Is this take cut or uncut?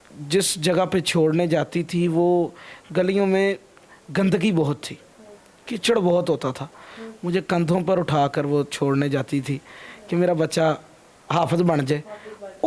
uncut